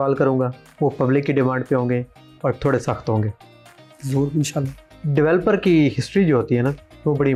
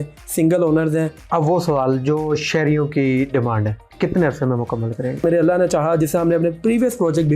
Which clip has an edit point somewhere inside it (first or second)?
second